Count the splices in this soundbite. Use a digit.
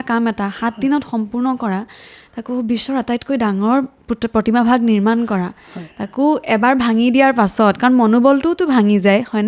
0